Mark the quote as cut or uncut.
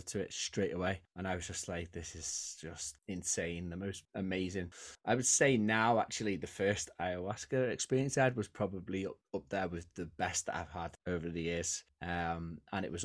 uncut